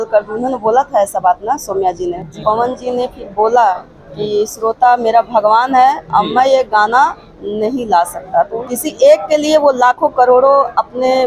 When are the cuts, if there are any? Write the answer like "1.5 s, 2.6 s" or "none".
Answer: 2.3 s, 8.6 s